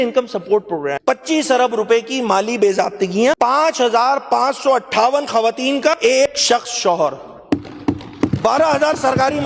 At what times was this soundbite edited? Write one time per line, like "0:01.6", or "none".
0:01.0
0:03.4
0:06.1